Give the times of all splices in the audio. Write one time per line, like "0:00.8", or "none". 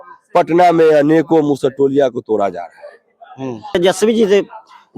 0:03.7